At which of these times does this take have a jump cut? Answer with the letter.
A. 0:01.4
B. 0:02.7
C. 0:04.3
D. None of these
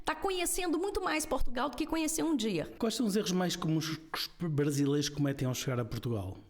B